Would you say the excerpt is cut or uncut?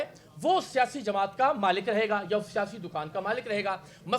uncut